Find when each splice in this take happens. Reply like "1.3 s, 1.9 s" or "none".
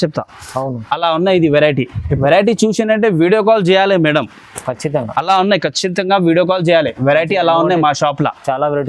2.2 s